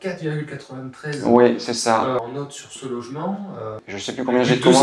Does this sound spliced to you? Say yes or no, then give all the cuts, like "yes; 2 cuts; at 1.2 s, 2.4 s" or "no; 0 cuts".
yes; 2 cuts; at 2.2 s, 3.9 s